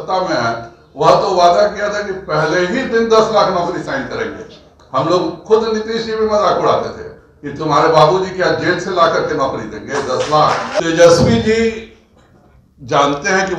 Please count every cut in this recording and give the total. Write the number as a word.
one